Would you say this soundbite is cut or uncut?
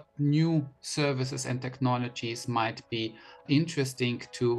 uncut